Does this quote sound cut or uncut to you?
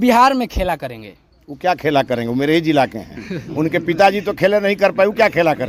uncut